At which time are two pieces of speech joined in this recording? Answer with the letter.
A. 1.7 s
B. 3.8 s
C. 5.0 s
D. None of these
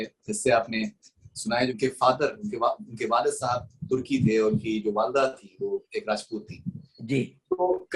A